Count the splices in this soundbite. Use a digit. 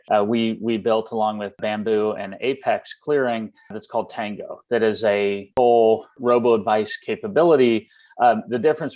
4